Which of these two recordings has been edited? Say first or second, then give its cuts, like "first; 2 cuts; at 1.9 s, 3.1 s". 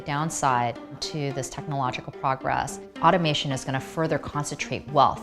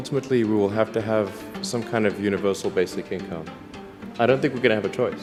first; 2 cuts; at 1.0 s, 2.8 s